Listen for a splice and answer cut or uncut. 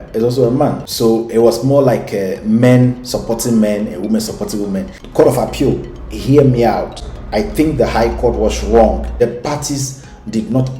cut